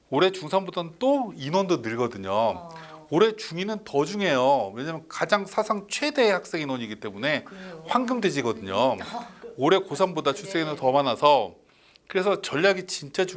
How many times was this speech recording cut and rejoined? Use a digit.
0